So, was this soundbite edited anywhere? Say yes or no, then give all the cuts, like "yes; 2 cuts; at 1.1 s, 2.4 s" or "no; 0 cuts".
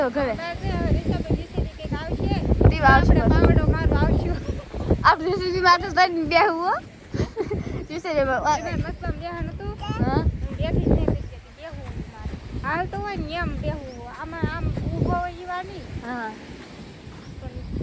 no; 0 cuts